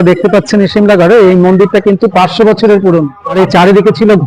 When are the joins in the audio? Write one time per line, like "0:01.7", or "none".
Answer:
0:03.2